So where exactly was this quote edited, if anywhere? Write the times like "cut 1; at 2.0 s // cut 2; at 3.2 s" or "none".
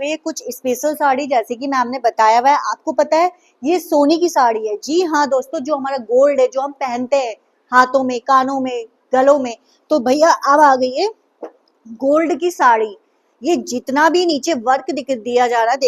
none

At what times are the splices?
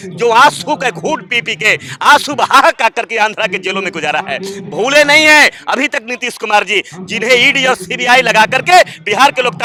none

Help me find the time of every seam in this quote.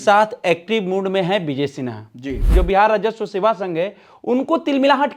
cut 1; at 2.4 s

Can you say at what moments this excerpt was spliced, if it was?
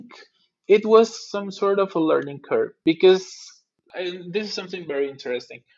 cut 1; at 2.7 s // cut 2; at 3.9 s

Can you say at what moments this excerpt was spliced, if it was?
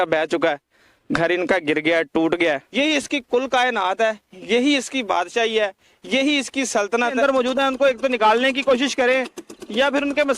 cut 1; at 2.7 s // cut 2; at 7.2 s

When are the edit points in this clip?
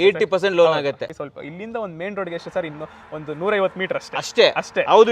cut 1; at 1.1 s

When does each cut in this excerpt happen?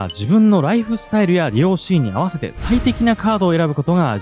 none

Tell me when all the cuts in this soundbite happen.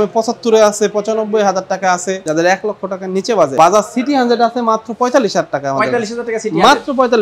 cut 1; at 2.2 s // cut 2; at 3.5 s

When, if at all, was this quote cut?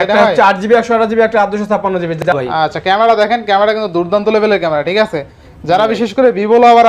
cut 1; at 2.2 s

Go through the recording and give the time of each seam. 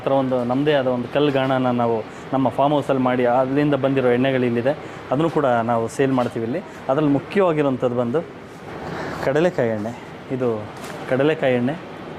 none

